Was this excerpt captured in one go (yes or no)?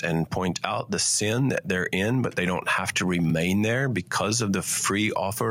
yes